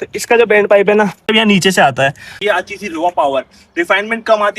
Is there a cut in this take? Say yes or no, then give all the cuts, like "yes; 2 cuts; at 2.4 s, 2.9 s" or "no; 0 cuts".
yes; 2 cuts; at 1.3 s, 2.3 s